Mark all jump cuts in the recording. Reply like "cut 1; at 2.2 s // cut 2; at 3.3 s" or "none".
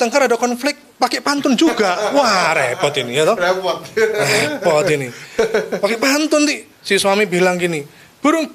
none